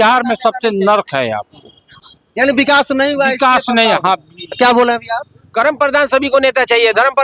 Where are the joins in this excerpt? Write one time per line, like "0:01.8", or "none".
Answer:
none